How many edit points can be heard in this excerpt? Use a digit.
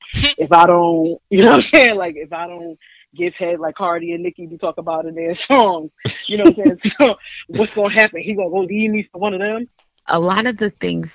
1